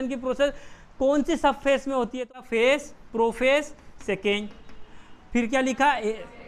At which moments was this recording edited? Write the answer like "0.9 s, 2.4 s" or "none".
2.3 s